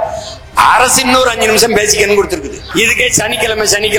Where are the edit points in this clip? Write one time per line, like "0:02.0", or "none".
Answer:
0:02.7